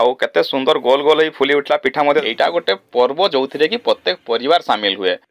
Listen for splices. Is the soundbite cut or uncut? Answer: cut